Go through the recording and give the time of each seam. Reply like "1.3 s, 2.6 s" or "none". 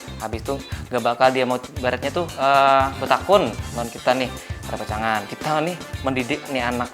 1.7 s, 5.3 s